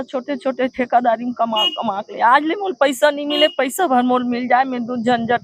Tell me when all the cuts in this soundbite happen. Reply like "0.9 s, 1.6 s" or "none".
none